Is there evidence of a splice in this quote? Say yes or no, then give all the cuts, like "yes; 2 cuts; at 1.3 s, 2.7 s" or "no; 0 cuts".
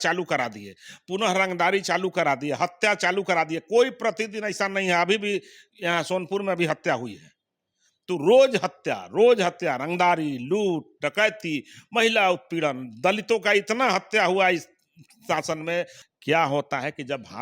yes; 1 cut; at 16.0 s